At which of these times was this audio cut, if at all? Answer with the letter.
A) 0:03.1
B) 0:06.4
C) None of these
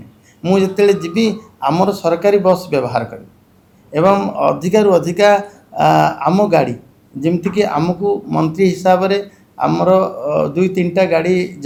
C